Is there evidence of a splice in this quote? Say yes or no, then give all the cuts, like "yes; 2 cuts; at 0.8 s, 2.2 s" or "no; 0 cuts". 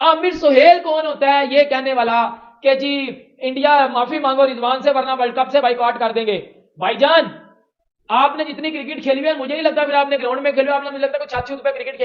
no; 0 cuts